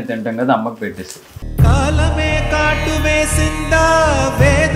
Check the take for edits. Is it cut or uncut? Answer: uncut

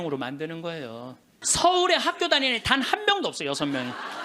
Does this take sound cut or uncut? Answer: cut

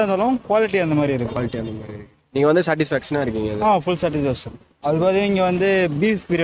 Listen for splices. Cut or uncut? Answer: uncut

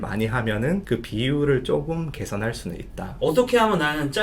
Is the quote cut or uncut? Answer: cut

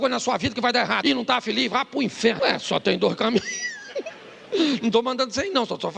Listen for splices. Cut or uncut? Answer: cut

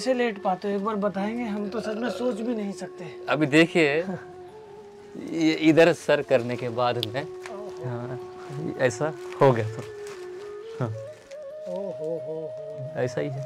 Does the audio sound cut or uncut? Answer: uncut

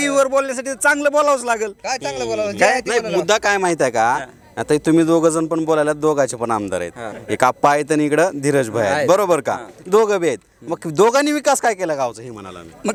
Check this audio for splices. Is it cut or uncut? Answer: uncut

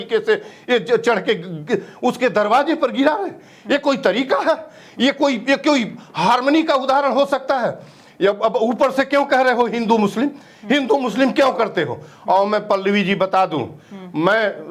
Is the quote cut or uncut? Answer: uncut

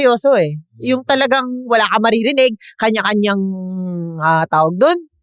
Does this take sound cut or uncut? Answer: uncut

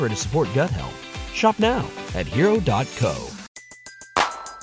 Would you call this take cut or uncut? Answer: cut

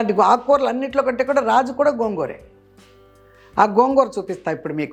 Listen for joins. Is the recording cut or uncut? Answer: uncut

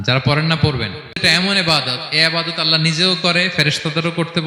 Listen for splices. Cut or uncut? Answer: cut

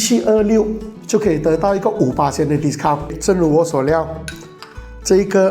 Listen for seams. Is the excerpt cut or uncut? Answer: cut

